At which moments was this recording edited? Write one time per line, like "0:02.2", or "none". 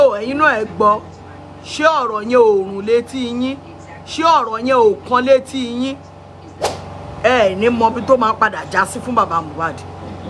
0:06.6

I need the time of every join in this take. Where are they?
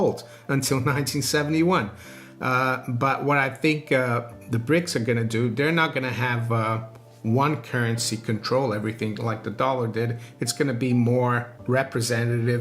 0:11.5

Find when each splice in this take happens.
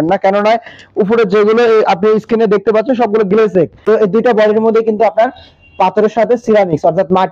0:03.8

